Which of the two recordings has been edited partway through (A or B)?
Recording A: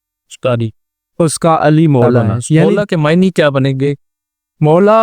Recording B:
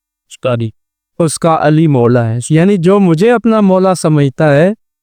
A